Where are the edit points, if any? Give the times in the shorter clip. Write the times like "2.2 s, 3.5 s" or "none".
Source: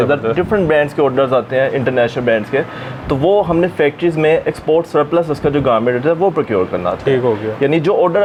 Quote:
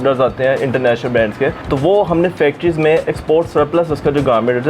1.6 s